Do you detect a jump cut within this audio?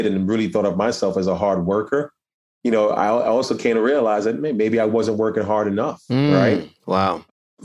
no; 0 cuts

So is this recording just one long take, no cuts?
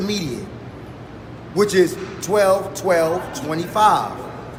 yes; 0 cuts

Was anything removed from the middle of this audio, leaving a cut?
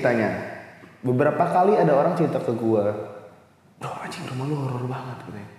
no; 0 cuts

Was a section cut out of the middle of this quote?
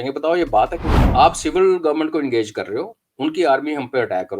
yes; 1 cut; at 0.9 s

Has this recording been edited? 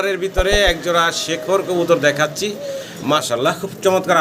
yes; 1 cut; at 3.2 s

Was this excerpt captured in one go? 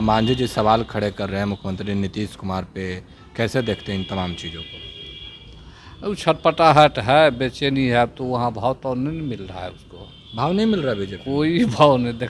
yes; 0 cuts

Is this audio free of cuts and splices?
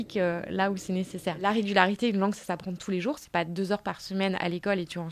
no; 1 cut; at 1.4 s

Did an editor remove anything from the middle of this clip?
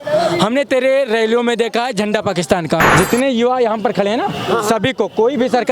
yes; 1 cut; at 2.9 s

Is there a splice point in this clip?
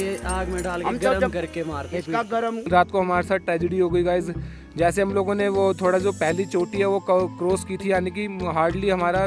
yes; 1 cut; at 2.7 s

